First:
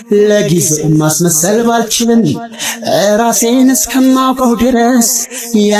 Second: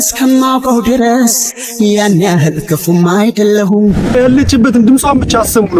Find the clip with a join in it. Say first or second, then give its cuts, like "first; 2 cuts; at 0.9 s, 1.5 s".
second; 1 cut; at 4.1 s